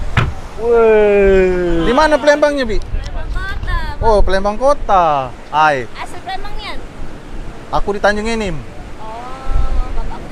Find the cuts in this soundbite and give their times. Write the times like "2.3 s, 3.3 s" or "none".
1.7 s

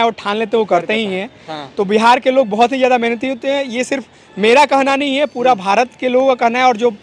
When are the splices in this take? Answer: none

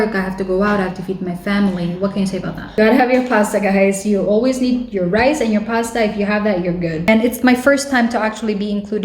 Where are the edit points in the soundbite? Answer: 2.8 s, 7.0 s

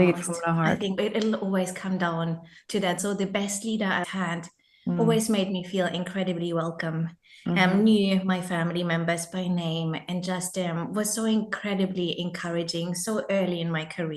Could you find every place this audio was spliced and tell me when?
1.0 s

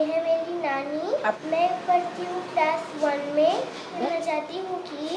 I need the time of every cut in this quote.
1.4 s, 4.0 s

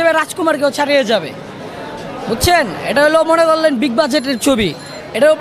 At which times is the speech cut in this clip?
none

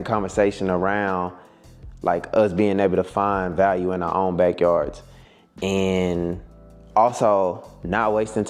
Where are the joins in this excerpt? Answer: none

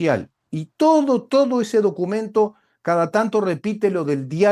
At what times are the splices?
none

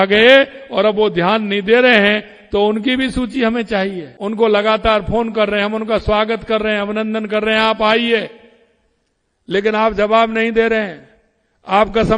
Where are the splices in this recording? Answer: 4.1 s

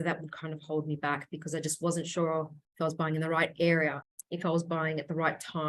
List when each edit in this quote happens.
2.6 s, 4.0 s

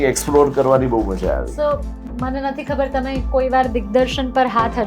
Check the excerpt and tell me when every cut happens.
1.9 s

